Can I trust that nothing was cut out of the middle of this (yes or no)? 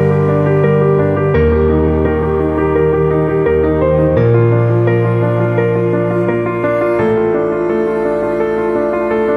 yes